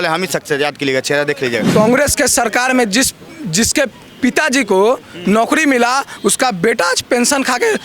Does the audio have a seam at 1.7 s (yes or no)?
yes